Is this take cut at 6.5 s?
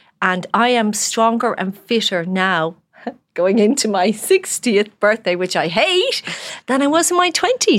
yes; 1 cut; at 6.5 s

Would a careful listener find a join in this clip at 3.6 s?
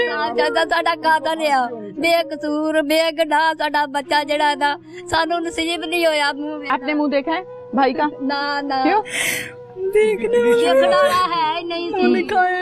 no; 1 cut; at 6.6 s

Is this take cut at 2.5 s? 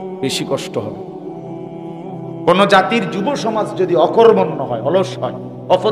yes; 2 cuts; at 0.9 s, 2.5 s

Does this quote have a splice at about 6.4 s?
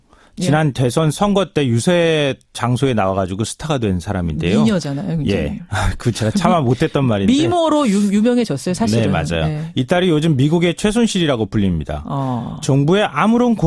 no; 1 cut; at 8.2 s

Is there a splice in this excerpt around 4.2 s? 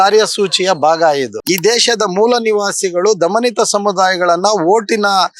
no; 1 cut; at 1.4 s

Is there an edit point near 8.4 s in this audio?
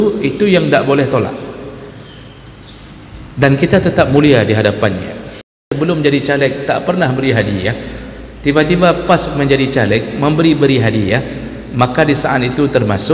no; 1 cut; at 5.7 s

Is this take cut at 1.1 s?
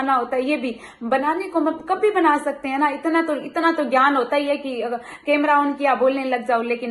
no; 0 cuts

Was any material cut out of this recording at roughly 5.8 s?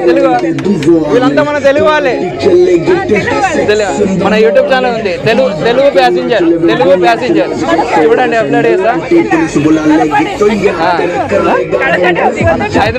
no; 0 cuts

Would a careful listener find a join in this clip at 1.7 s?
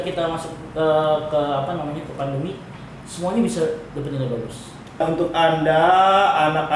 no; 1 cut; at 5.0 s

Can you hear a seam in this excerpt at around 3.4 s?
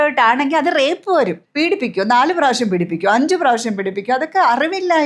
no; 1 cut; at 1.4 s

